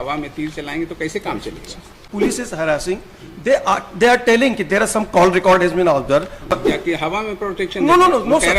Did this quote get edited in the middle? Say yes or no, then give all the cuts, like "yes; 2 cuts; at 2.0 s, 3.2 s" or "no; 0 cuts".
yes; 2 cuts; at 2.0 s, 6.5 s